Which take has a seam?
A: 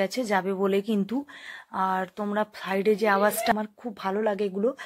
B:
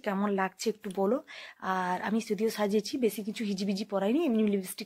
A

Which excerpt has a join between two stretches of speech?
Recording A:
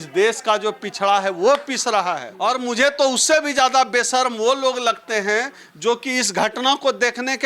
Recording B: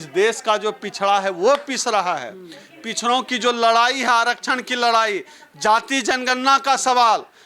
A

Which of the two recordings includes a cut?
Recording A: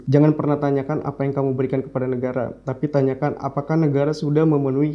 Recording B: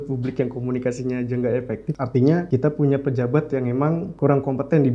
B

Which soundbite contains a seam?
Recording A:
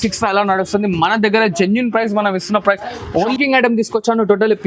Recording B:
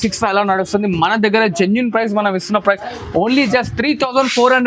A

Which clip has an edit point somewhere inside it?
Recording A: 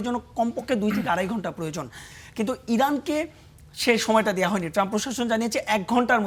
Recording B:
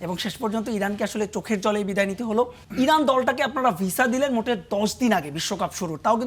B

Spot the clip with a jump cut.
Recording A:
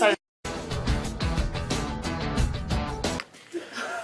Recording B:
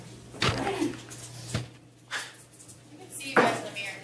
A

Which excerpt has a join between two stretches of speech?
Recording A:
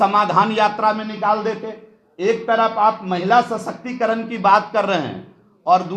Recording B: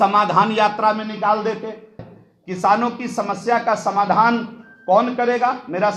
B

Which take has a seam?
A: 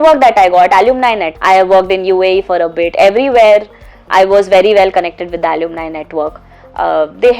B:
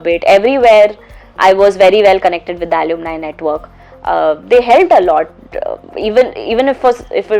A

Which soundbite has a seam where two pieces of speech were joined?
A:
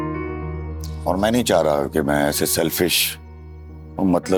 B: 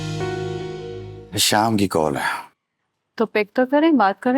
B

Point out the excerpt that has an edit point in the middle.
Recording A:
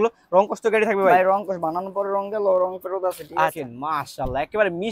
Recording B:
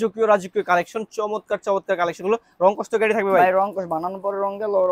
A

